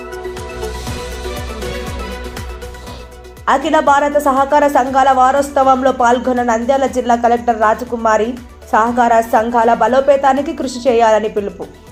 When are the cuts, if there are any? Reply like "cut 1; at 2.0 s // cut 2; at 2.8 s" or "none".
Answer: none